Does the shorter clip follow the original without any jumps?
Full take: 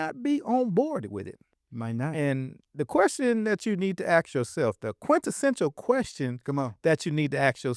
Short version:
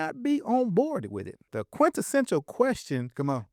no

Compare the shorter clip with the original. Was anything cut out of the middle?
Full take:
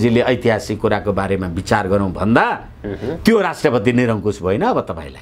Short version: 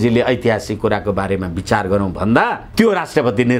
yes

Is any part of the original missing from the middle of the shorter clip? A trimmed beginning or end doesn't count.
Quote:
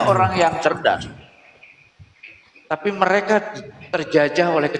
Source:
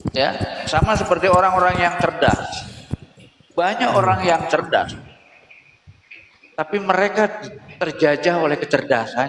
no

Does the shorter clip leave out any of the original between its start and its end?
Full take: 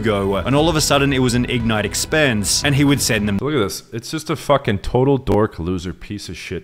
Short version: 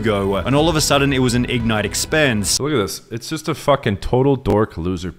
yes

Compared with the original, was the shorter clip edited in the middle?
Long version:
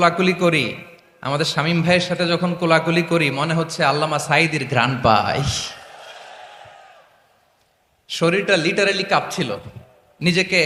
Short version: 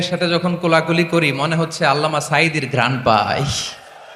no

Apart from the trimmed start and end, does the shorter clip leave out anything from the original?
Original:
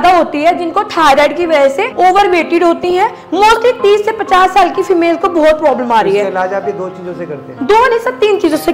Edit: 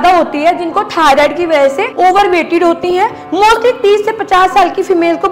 no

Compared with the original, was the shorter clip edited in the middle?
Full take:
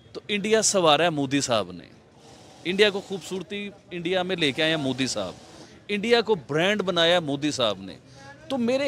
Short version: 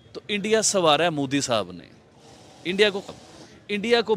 yes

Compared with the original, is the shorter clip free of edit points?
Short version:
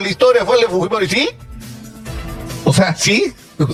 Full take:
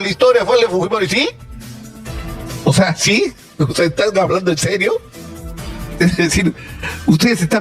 yes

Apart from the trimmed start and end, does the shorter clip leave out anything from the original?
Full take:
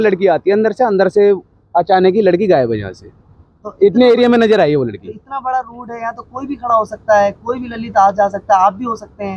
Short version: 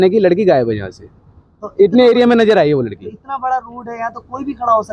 no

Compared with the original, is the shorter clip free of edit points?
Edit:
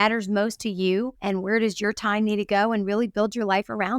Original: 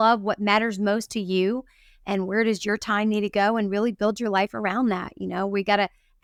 no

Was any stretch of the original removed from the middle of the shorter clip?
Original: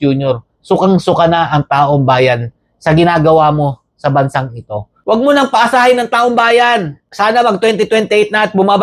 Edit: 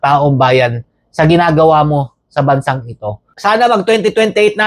yes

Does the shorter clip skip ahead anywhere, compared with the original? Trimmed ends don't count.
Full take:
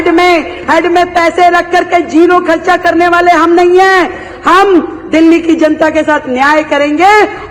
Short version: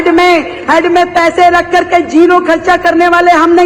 no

